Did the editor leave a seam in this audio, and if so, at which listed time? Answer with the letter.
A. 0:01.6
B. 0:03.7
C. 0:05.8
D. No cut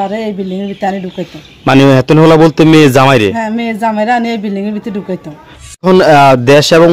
C